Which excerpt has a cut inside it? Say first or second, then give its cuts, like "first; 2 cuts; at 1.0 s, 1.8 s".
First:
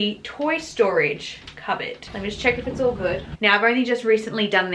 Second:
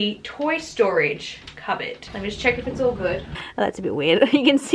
second; 1 cut; at 3.3 s